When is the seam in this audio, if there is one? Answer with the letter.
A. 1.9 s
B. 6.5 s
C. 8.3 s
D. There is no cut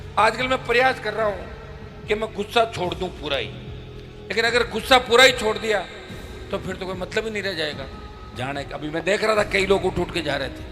C